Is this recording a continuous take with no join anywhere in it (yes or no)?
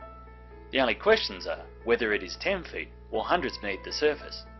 no